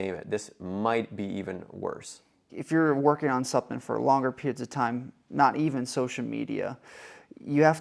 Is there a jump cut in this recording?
yes; 1 cut; at 2.6 s

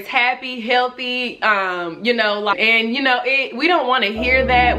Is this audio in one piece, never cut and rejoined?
no; 1 cut; at 2.5 s

